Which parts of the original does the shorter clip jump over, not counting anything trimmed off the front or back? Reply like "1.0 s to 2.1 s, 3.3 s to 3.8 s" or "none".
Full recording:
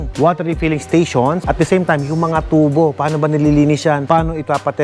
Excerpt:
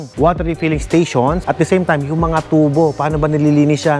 none